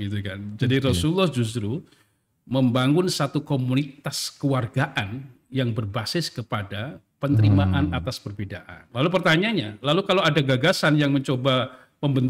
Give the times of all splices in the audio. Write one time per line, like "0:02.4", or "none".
0:08.8